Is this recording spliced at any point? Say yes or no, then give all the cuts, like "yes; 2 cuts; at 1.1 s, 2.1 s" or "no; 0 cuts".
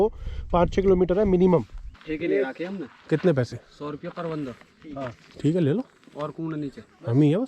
yes; 1 cut; at 2.0 s